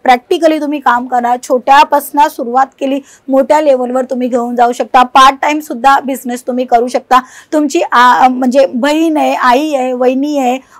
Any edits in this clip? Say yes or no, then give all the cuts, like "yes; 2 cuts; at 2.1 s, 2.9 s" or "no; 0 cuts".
no; 0 cuts